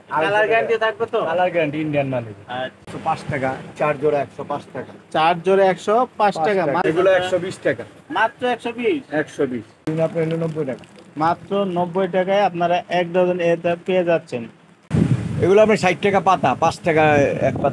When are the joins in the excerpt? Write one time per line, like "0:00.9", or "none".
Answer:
0:02.9
0:06.8
0:09.8
0:14.7